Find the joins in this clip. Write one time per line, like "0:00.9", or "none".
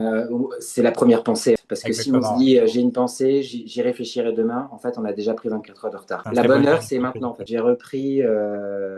0:01.6
0:06.2
0:07.4